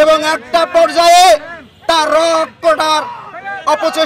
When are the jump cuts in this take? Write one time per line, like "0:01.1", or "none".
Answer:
none